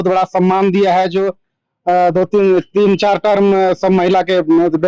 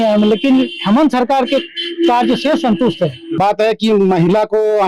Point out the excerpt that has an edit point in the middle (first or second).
second